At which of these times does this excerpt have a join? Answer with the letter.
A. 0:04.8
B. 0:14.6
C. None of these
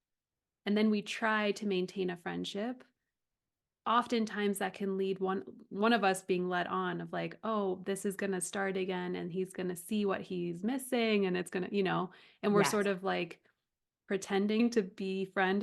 B